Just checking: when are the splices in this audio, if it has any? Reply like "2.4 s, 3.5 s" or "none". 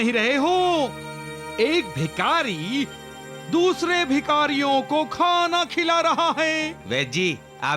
6.8 s